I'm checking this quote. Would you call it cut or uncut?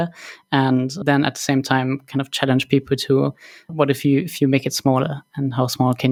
uncut